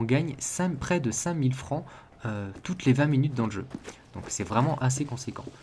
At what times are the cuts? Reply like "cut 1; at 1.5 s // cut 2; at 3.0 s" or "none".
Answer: cut 1; at 3.8 s